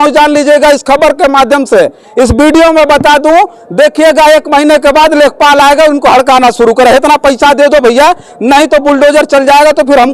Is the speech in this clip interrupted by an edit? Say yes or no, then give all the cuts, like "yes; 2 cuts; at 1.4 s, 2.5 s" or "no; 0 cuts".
no; 0 cuts